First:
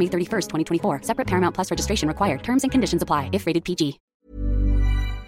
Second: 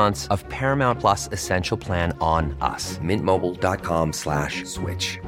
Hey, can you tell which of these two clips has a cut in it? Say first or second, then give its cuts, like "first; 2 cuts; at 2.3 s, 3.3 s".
first; 1 cut; at 4.0 s